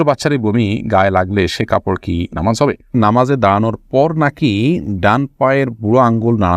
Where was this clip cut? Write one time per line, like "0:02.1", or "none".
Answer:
0:02.9